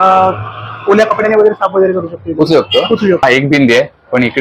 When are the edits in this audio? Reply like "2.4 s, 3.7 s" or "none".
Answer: 3.2 s